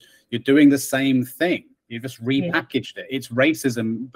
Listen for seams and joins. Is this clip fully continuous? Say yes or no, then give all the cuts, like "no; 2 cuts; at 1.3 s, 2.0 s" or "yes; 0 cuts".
yes; 0 cuts